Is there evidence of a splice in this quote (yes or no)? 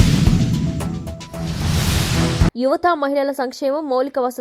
yes